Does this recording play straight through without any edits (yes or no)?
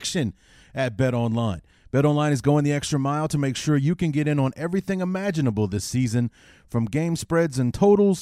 yes